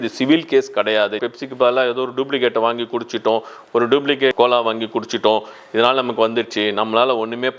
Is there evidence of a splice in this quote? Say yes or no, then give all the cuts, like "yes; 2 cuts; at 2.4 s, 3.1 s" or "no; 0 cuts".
yes; 2 cuts; at 1.2 s, 4.3 s